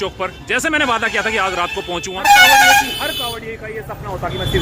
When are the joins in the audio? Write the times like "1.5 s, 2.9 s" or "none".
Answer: 2.2 s